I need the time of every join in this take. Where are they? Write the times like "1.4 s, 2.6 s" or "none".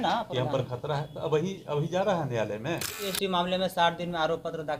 3.1 s